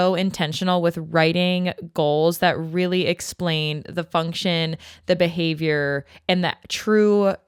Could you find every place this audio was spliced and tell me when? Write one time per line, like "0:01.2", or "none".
none